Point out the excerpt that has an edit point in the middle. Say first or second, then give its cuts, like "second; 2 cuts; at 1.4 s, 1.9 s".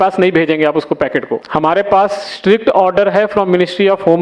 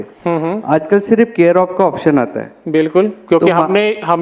first; 1 cut; at 1.5 s